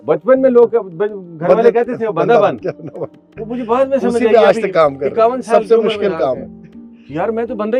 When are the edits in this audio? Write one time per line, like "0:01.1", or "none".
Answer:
none

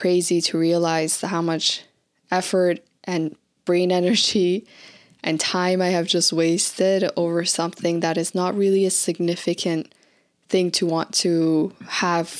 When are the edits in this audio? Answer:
none

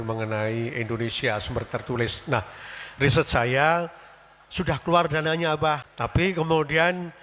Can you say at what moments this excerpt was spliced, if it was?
0:05.9

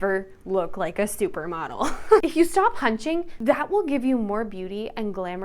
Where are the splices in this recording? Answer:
0:02.2
0:03.3

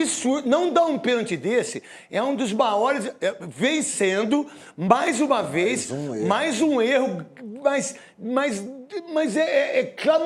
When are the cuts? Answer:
none

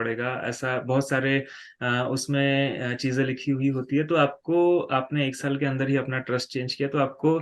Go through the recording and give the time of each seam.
none

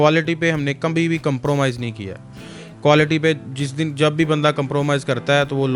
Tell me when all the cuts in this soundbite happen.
none

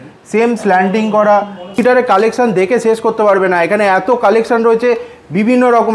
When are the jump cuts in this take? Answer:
0:01.8

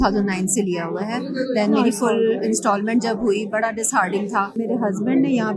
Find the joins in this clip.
0:04.5

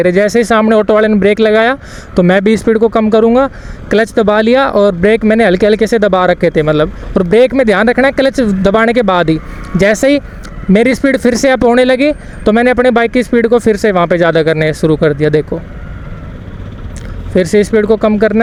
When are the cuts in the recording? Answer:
none

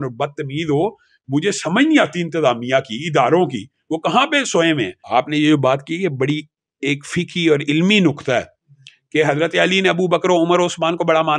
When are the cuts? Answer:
0:05.0

